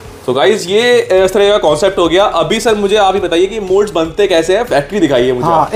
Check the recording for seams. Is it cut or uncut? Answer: uncut